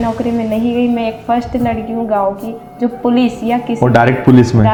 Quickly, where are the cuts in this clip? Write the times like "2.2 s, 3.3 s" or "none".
none